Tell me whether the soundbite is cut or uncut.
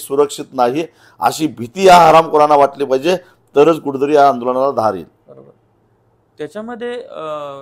uncut